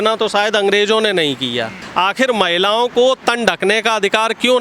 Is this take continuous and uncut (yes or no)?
no